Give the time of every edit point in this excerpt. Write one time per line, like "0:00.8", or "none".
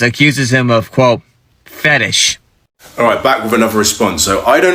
0:02.8